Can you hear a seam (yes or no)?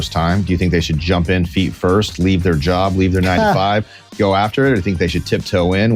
no